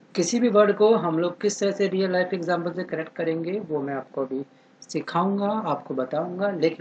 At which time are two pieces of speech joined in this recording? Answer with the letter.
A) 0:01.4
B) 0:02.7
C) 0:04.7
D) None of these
D